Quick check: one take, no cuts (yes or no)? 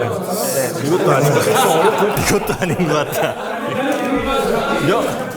yes